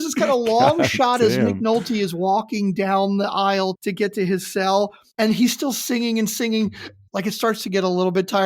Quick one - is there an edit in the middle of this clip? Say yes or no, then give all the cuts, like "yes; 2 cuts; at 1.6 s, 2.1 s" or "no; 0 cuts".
yes; 3 cuts; at 3.8 s, 5.0 s, 6.9 s